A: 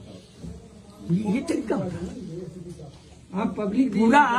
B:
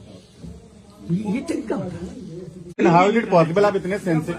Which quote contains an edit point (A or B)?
B